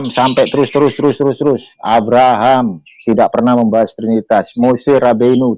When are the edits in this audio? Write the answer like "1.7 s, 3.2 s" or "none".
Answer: none